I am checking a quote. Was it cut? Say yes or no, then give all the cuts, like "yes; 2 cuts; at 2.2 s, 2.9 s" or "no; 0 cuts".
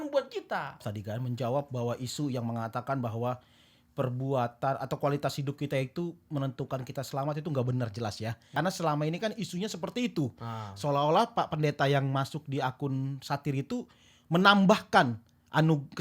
yes; 2 cuts; at 0.9 s, 8.5 s